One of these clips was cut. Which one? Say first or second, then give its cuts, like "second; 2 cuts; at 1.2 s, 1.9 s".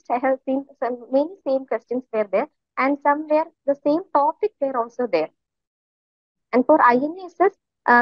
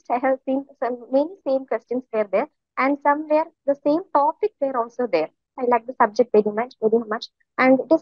second; 1 cut; at 5.6 s